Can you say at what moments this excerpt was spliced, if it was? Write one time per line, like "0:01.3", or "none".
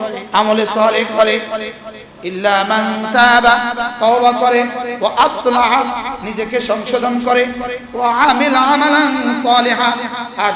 none